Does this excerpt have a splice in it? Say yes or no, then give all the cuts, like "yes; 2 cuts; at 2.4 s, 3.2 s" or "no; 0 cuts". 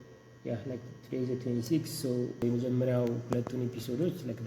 yes; 1 cut; at 2.4 s